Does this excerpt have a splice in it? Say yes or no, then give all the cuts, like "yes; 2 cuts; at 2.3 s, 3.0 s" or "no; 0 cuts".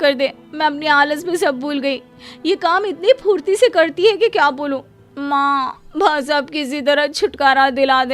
no; 0 cuts